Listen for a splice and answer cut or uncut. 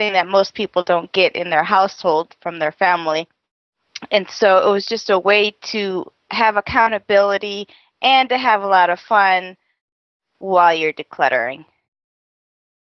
uncut